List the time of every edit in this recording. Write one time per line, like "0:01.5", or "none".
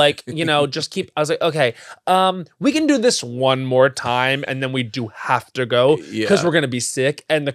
none